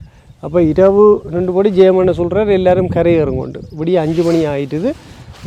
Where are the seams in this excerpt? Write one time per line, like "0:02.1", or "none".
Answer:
none